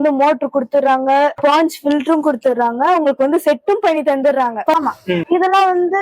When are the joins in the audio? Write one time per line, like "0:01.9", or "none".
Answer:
0:04.7